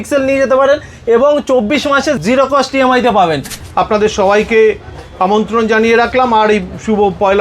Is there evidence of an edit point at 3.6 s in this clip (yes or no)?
yes